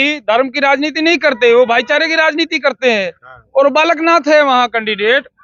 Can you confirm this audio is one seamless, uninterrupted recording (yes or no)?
yes